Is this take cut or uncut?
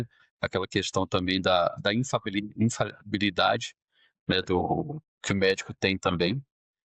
uncut